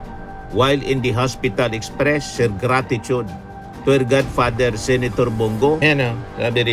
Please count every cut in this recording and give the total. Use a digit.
1